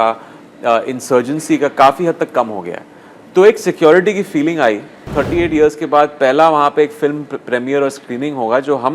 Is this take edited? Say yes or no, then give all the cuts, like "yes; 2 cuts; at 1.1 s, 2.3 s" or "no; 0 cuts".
yes; 1 cut; at 5.0 s